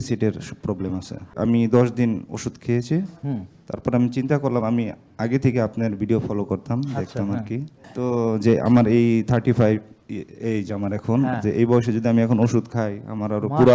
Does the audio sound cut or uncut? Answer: cut